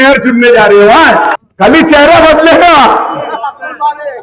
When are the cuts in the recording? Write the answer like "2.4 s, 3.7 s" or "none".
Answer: 1.4 s

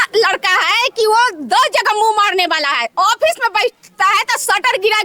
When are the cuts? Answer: none

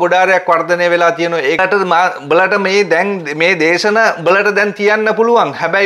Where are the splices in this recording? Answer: 1.6 s

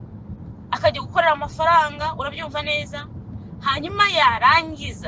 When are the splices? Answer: none

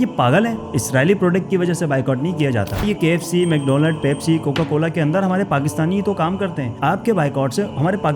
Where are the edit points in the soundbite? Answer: 2.8 s

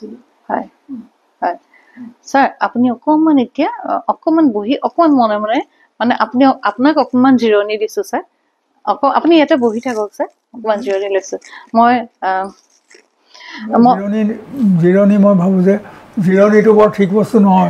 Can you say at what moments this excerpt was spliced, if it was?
none

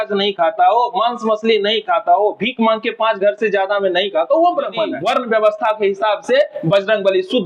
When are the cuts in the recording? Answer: 4.9 s

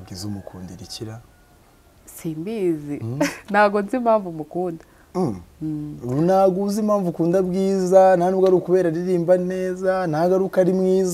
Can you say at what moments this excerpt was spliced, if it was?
none

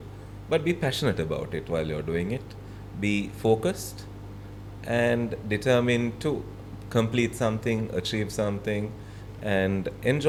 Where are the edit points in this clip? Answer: none

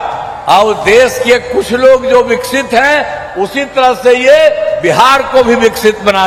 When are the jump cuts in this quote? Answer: none

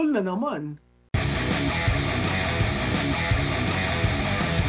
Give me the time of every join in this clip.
none

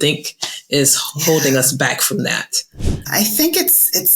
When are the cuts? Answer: 3.0 s

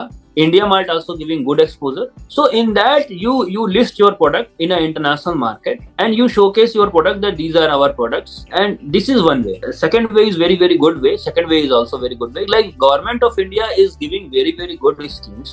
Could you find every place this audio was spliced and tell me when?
none

